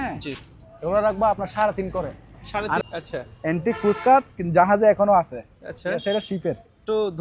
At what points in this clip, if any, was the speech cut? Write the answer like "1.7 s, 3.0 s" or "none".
2.8 s